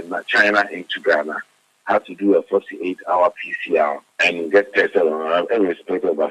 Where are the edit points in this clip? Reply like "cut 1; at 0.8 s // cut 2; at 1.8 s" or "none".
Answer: cut 1; at 4.1 s